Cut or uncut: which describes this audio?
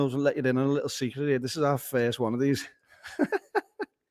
uncut